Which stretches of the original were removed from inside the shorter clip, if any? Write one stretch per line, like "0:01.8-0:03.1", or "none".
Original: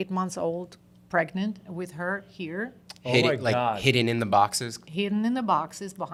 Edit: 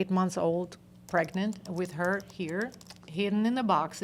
0:02.9-0:04.7

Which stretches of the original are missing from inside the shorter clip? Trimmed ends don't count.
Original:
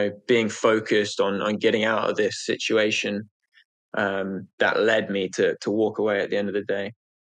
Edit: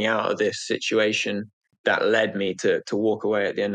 0:03.5-0:04.4

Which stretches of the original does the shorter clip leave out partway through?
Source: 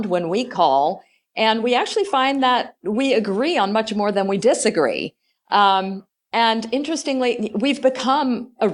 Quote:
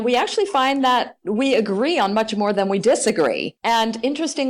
0:05.1-0:06.2

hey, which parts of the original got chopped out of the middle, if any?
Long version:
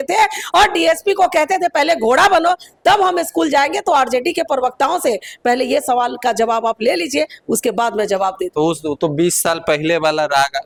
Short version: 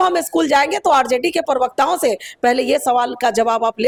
none

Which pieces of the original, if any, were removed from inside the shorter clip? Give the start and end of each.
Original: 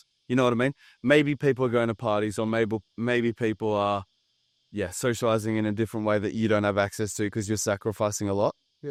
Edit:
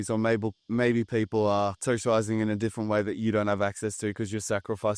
0:04.1-0:04.9

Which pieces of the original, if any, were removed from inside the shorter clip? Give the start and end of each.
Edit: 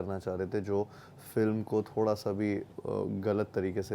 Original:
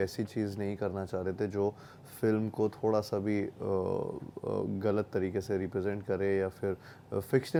0:03.6-0:04.3

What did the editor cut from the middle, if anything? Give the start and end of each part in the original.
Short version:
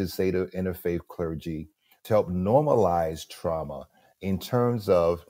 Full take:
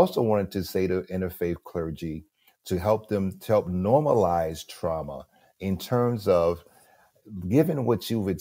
0:02.5-0:03.4

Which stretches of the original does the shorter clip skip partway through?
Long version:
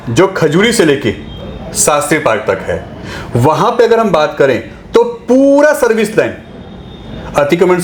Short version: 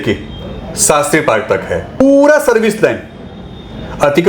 0:03.0-0:05.3

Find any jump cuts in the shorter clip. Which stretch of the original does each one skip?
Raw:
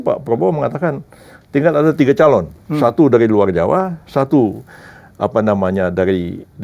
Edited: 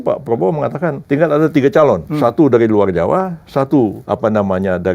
0:01.0-0:01.4
0:02.5-0:02.7
0:04.6-0:05.1

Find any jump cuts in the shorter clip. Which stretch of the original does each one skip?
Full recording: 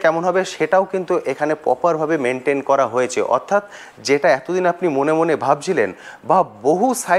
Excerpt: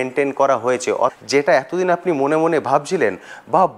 0:03.4-0:03.9

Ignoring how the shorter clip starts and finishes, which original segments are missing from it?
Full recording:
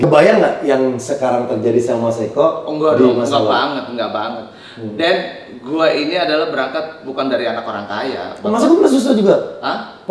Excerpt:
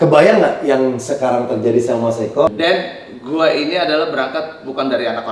0:02.5-0:04.9

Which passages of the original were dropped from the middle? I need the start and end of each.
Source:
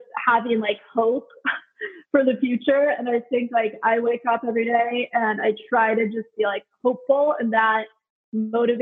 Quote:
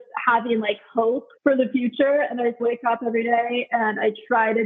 0:01.3-0:02.0
0:03.3-0:04.0

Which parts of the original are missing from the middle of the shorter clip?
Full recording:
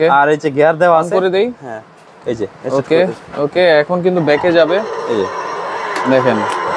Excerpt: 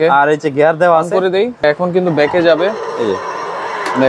0:01.6-0:03.7

